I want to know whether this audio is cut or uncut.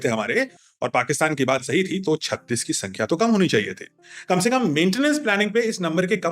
uncut